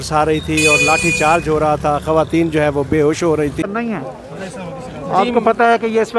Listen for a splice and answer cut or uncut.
cut